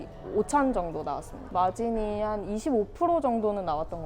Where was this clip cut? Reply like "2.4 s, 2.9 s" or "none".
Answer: 1.5 s